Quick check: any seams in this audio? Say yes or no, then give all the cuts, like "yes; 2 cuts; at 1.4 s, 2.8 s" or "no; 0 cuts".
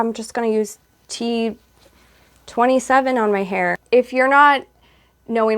yes; 1 cut; at 3.8 s